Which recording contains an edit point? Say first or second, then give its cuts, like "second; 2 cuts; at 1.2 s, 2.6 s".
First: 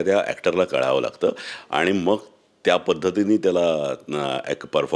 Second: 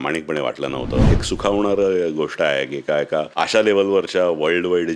second; 2 cuts; at 1.1 s, 3.3 s